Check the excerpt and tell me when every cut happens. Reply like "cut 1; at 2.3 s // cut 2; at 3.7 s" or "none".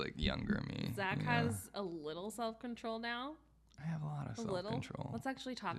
none